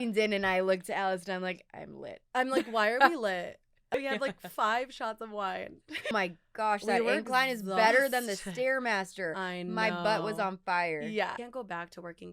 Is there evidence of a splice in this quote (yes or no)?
yes